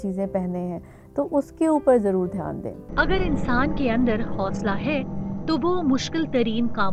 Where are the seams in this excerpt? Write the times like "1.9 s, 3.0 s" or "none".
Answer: 2.8 s